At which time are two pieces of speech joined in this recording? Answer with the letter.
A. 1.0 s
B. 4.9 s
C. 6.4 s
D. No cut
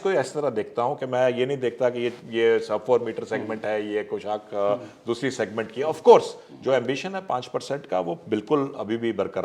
C